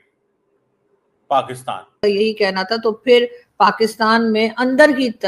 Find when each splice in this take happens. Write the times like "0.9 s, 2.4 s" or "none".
2.0 s